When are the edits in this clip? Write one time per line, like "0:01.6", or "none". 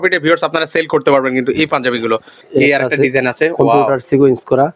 0:02.4